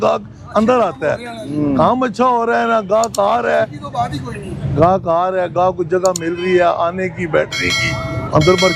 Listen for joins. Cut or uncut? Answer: uncut